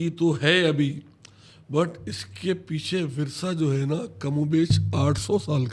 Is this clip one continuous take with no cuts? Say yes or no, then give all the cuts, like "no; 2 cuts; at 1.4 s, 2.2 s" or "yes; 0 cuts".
yes; 0 cuts